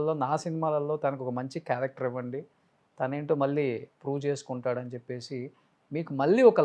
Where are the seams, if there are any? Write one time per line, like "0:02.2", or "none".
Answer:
none